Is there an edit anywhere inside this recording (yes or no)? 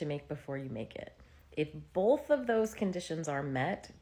no